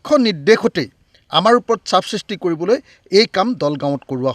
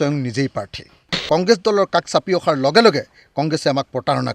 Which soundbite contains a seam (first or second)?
second